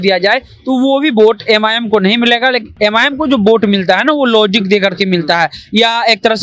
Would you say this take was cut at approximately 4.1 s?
no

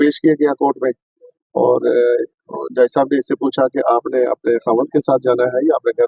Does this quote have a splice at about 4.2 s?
no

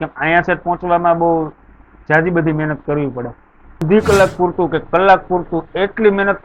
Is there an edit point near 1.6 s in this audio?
no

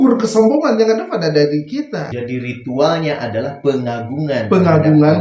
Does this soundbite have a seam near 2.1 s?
yes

